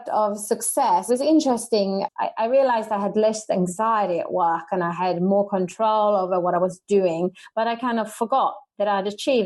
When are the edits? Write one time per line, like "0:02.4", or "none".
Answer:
0:01.1
0:02.1